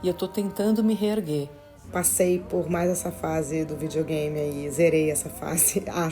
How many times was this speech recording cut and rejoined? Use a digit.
1